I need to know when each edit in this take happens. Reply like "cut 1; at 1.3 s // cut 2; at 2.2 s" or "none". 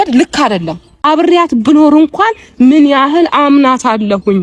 cut 1; at 1.0 s

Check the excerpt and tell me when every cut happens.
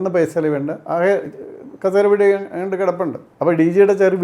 cut 1; at 3.2 s

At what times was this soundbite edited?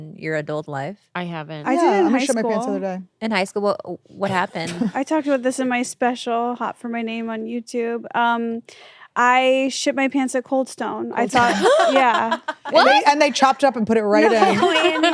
none

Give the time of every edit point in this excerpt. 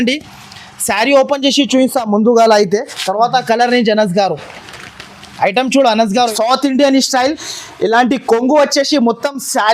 cut 1; at 6.3 s

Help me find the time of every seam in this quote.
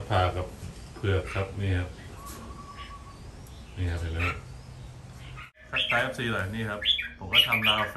cut 1; at 5.6 s

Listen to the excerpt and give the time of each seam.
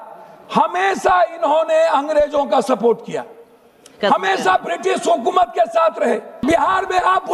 cut 1; at 6.3 s

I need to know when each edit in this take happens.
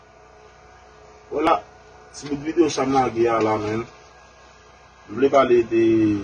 cut 1; at 1.5 s

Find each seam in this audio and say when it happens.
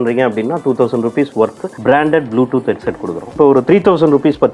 cut 1; at 3.4 s

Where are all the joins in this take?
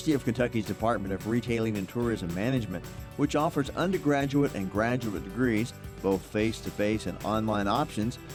none

